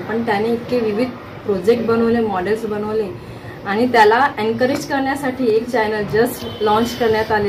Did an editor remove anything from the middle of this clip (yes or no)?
yes